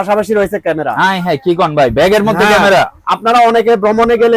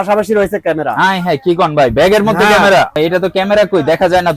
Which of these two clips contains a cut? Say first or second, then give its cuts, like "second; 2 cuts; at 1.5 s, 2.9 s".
second; 1 cut; at 2.9 s